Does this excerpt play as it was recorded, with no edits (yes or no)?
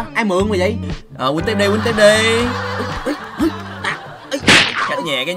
no